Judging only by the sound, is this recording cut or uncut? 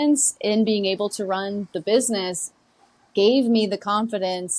uncut